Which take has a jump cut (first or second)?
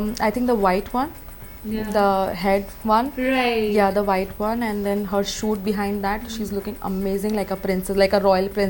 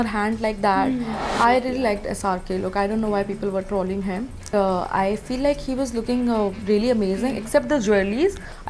second